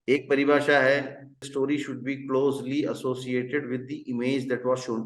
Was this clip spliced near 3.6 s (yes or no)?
no